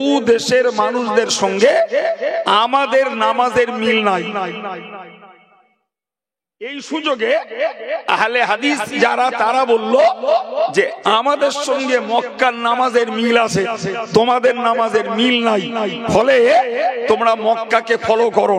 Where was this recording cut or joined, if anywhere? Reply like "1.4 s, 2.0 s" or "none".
none